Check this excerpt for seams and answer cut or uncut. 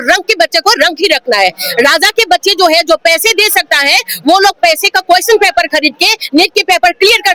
uncut